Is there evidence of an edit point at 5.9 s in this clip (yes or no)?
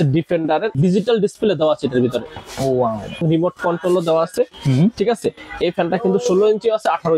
no